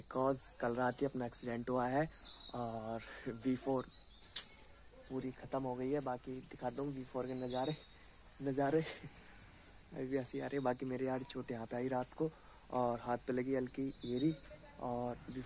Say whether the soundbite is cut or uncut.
uncut